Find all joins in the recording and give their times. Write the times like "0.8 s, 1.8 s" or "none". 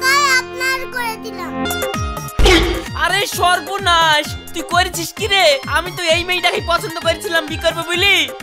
1.7 s